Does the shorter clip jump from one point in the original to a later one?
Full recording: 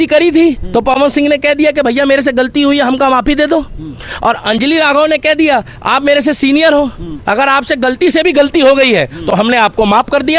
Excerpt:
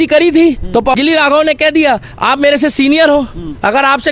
yes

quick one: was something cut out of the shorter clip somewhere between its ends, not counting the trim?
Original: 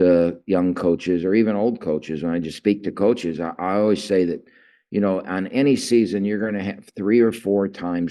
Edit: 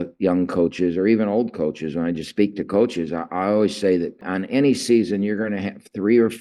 yes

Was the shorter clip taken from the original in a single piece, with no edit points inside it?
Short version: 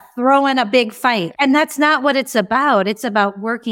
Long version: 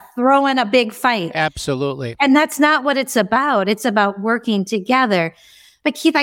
no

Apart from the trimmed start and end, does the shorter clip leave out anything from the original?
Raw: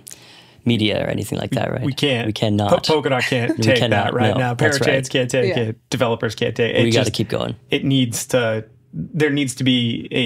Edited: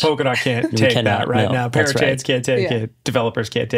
no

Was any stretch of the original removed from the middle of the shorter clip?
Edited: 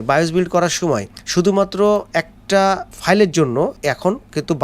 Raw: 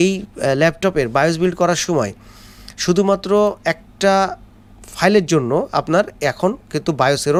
yes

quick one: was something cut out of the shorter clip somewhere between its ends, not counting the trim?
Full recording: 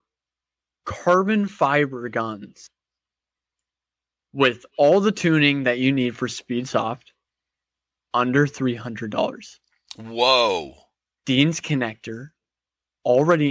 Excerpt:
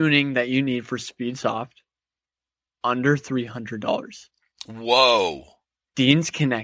no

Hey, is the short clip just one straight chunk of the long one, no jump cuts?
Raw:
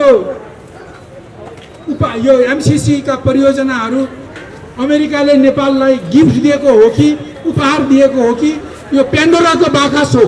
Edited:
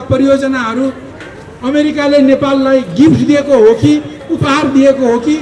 yes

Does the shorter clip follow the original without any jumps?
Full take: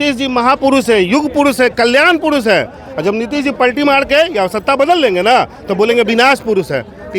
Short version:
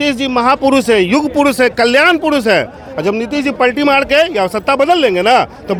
yes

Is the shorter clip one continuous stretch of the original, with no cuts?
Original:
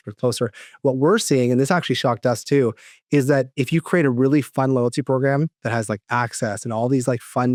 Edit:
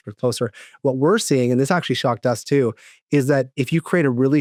yes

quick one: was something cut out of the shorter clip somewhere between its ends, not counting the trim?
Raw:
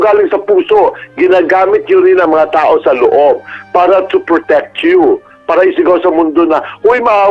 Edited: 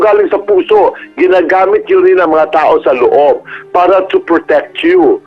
no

